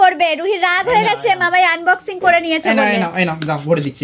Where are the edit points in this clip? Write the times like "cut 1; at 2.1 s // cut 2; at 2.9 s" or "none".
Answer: none